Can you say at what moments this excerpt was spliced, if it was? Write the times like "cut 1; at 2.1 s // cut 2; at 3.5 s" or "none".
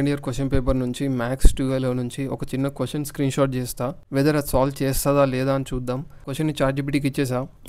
cut 1; at 4.0 s // cut 2; at 6.3 s